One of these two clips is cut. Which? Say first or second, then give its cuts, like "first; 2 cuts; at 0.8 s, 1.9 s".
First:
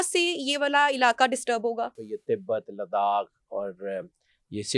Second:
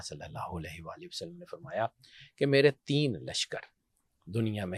first; 1 cut; at 1.9 s